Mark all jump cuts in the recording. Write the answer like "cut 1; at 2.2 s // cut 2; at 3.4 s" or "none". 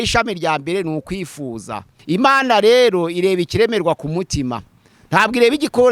cut 1; at 1.9 s